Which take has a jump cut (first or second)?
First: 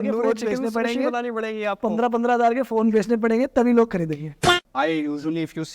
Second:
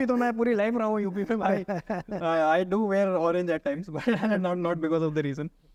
first